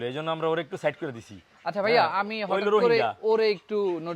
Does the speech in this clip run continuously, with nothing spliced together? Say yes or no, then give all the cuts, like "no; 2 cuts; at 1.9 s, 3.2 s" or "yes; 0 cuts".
yes; 0 cuts